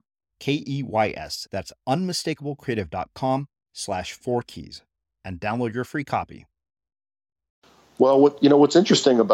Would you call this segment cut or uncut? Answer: cut